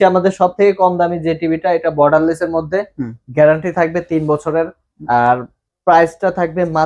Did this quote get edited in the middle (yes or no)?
no